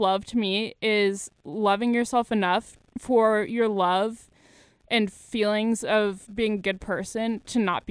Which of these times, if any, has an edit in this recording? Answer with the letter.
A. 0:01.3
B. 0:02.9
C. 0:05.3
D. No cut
D